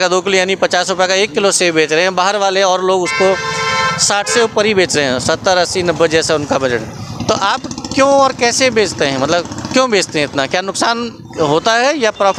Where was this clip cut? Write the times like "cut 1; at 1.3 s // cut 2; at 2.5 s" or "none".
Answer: none